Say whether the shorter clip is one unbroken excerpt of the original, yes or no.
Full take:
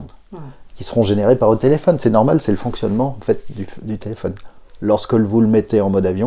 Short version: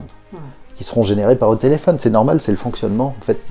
yes